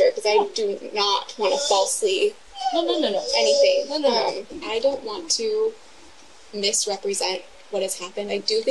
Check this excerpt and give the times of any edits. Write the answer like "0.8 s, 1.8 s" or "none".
4.5 s